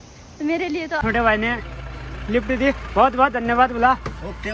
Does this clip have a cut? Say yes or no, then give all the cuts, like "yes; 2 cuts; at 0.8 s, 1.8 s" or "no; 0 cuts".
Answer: yes; 1 cut; at 1.0 s